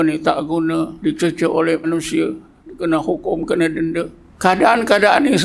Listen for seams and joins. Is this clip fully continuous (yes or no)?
no